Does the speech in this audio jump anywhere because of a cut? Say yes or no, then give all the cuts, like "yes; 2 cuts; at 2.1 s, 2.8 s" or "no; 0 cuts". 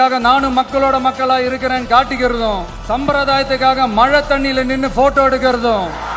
yes; 1 cut; at 2.7 s